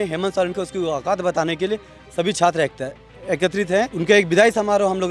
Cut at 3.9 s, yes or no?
yes